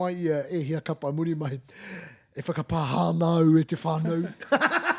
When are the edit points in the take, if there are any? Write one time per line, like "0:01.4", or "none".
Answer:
none